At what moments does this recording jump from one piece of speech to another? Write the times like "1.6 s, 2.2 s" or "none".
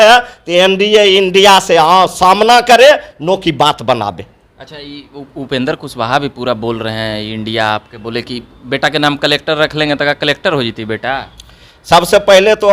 none